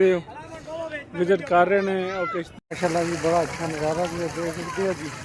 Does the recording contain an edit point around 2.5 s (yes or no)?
yes